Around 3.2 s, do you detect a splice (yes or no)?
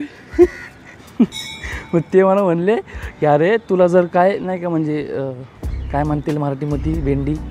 no